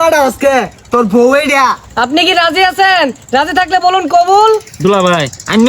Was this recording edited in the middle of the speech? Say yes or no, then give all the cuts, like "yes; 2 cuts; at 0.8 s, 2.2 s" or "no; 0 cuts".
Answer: yes; 2 cuts; at 1.8 s, 4.7 s